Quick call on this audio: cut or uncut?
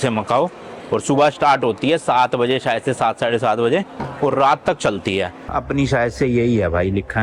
cut